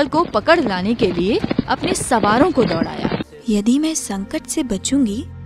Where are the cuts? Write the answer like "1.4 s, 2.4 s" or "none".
3.3 s